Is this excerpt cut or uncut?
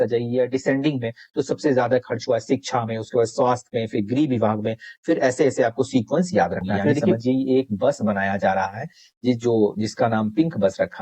cut